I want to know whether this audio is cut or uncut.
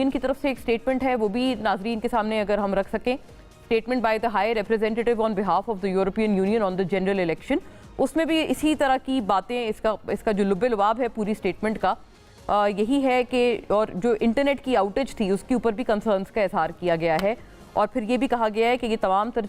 uncut